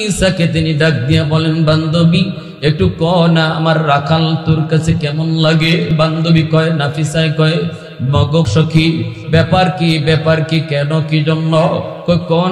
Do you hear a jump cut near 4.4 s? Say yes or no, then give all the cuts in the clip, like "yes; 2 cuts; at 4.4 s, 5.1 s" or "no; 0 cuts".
no; 2 cuts; at 5.9 s, 8.5 s